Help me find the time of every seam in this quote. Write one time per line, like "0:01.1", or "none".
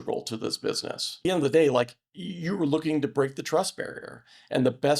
0:01.2